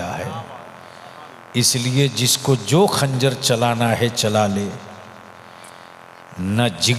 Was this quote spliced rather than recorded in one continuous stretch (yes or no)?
no